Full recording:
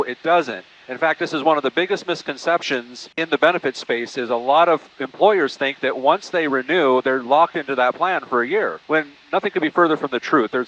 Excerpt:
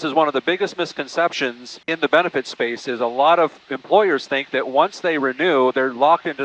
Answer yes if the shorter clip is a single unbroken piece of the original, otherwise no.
yes